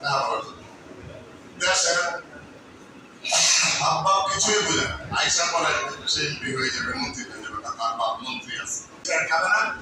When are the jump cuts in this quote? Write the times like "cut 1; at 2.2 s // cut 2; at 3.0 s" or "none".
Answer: cut 1; at 8.9 s